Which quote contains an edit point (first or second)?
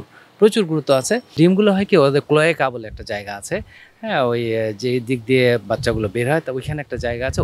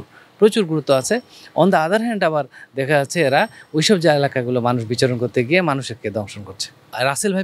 first